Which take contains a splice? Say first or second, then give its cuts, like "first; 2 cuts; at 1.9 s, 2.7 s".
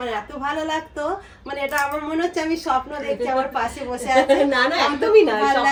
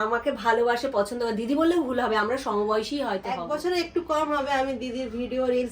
second; 1 cut; at 3.4 s